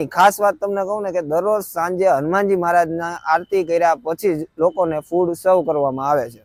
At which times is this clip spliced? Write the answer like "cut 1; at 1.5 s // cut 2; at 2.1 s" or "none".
none